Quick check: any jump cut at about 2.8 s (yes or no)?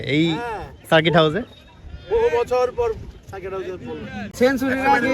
no